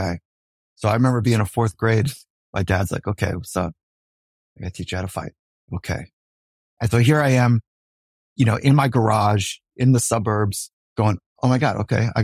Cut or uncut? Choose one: cut